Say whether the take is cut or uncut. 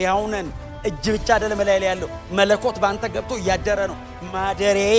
uncut